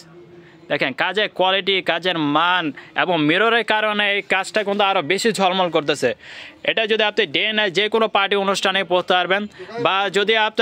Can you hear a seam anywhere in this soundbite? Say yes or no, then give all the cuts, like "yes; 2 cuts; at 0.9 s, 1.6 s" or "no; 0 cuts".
no; 0 cuts